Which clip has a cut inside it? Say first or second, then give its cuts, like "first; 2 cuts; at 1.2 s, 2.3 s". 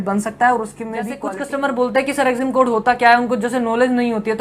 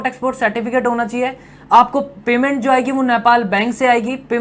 first; 1 cut; at 1.2 s